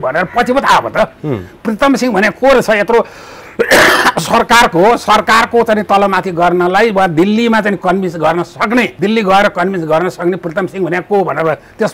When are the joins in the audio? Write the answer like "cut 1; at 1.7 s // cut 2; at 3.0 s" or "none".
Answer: none